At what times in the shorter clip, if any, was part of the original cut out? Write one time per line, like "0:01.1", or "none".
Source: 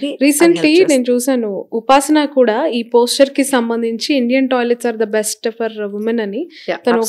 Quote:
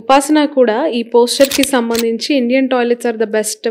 none